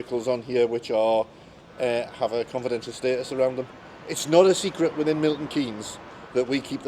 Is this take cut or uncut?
uncut